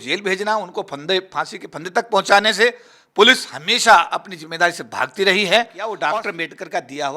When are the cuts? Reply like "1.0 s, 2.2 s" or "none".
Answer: 6.0 s